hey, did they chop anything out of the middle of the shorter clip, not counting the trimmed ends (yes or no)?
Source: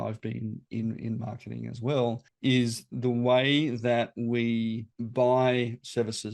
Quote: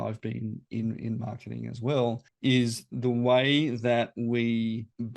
no